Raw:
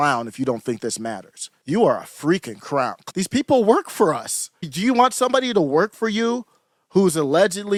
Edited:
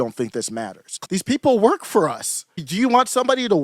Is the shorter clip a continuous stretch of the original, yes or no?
no